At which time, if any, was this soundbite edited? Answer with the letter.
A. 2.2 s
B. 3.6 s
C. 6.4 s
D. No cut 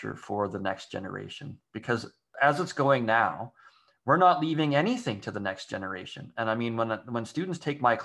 A